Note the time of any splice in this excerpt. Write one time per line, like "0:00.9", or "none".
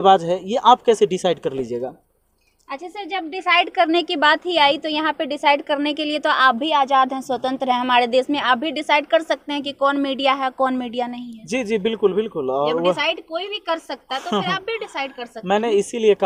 none